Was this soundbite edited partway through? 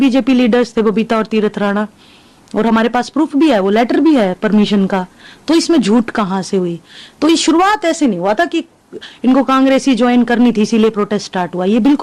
no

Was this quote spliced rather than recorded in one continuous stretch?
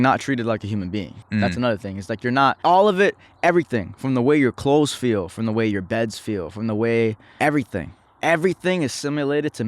yes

